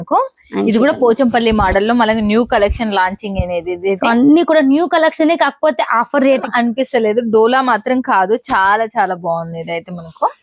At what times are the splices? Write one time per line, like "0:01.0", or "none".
0:06.4